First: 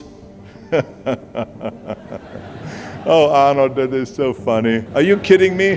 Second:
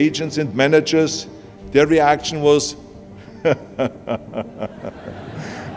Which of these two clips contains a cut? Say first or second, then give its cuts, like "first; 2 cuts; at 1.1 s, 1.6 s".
first; 1 cut; at 4.9 s